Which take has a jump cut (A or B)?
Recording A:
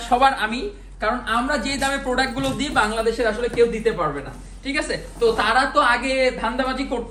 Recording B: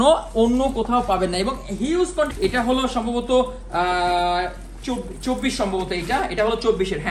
B